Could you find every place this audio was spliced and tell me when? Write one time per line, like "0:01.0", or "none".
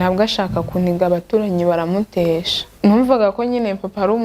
0:02.8